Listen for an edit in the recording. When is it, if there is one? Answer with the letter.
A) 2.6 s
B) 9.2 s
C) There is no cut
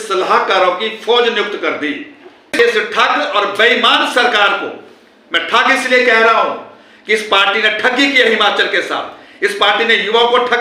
A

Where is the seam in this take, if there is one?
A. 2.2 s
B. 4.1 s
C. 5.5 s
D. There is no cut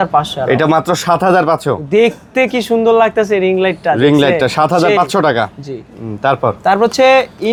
D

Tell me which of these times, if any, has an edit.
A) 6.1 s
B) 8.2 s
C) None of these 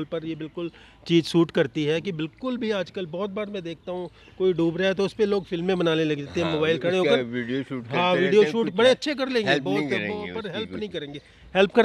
C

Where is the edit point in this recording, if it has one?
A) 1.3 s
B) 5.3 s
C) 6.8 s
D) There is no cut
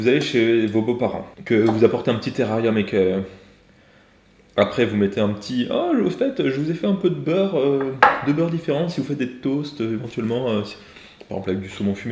A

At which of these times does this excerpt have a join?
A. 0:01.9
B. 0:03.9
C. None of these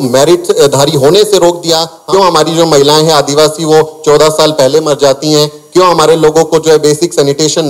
A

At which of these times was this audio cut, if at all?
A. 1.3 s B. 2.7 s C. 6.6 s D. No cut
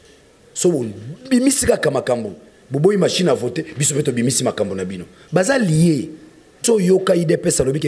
C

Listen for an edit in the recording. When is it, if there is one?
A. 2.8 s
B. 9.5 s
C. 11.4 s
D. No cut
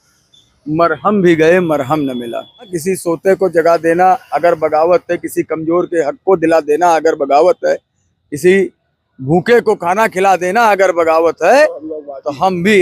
A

